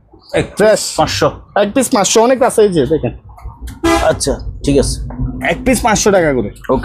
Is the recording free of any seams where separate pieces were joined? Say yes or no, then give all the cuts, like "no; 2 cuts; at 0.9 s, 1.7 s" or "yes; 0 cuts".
yes; 0 cuts